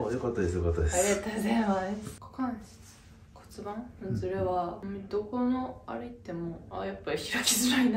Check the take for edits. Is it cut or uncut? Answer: cut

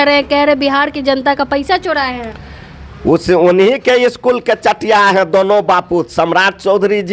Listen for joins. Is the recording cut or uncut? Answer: uncut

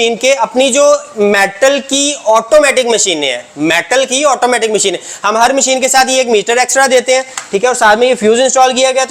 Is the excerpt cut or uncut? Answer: uncut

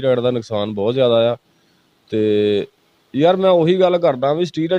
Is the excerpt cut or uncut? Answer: uncut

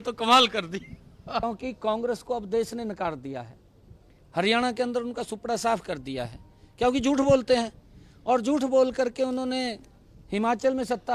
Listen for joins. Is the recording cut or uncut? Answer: cut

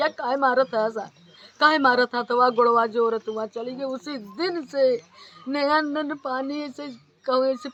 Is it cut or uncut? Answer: uncut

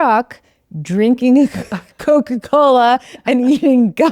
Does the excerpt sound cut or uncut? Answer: uncut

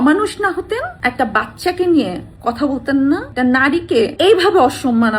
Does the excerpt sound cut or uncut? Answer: uncut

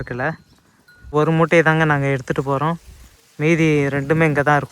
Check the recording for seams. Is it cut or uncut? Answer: cut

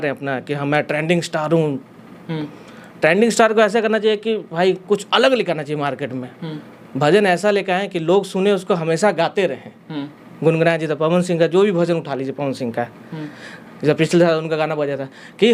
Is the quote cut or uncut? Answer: uncut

